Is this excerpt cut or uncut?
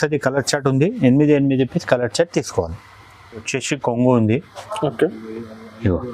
cut